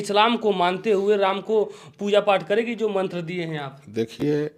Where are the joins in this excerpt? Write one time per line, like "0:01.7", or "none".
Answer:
none